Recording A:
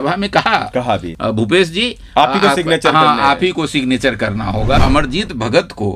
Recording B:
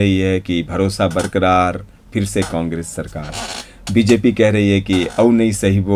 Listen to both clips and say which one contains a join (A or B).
A